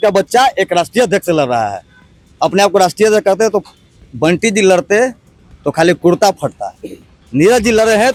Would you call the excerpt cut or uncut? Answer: uncut